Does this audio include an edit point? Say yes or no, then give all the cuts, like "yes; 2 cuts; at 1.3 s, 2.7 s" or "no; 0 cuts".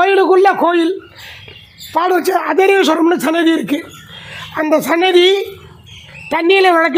no; 0 cuts